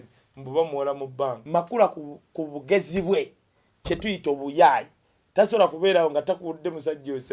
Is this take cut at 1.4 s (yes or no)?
yes